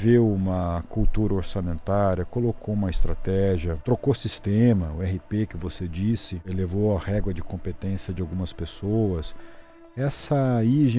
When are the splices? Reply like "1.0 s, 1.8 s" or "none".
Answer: 3.8 s, 6.4 s